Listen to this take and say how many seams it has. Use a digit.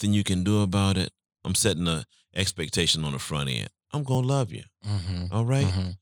1